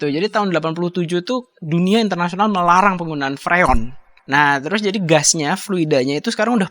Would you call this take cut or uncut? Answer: cut